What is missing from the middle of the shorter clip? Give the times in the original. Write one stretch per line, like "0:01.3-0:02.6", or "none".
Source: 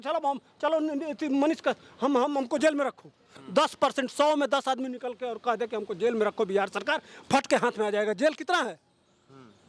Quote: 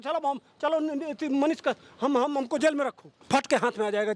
0:03.1-0:07.1

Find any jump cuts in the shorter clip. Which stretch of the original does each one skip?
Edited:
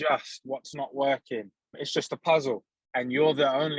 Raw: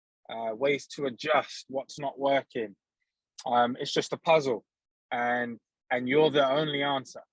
0:03.0-0:03.8
0:04.8-0:05.7

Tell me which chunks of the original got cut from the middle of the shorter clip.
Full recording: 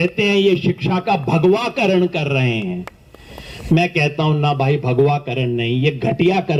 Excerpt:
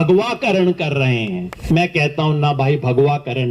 0:02.9-0:03.5

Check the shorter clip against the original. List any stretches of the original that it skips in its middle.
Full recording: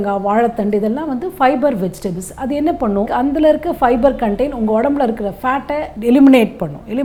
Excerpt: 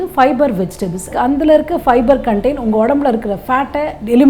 0:02.4-0:03.1

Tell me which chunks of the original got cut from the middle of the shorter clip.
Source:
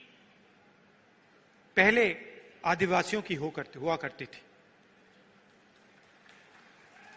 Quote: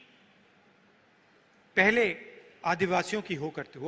none

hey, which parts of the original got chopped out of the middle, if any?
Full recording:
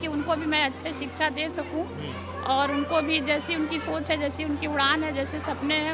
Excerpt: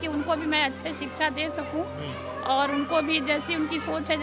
none

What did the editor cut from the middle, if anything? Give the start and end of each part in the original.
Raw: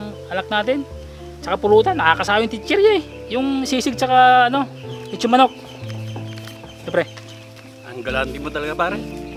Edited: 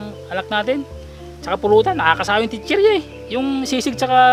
none

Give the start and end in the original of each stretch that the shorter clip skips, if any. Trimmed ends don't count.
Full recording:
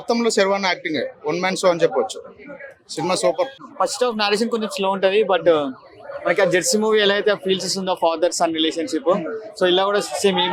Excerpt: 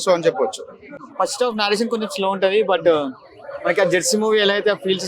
0:02.6-0:03.6

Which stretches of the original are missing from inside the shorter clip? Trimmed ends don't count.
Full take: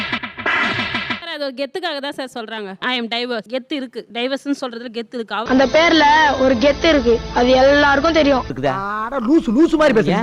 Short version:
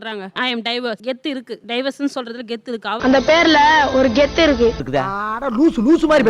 0:07.3-0:08.5

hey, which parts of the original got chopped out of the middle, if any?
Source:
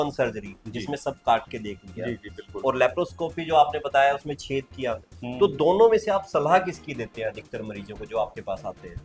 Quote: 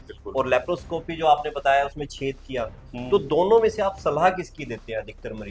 none

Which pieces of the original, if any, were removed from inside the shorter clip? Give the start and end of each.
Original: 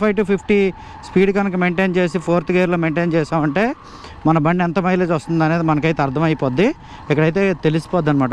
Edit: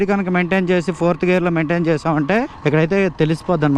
0:03.8-0:07.0

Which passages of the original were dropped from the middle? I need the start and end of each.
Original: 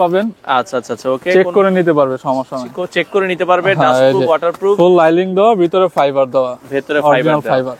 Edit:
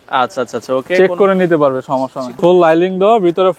0:02.8-0:04.8

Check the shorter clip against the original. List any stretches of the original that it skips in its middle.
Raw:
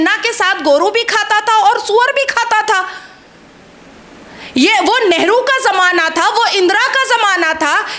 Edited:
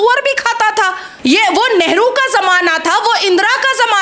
0:03.0-0:04.4

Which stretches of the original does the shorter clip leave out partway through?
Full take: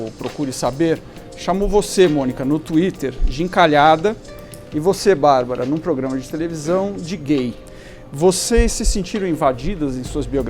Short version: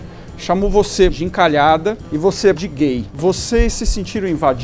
0:02.1-0:03.3
0:04.7-0:07.5

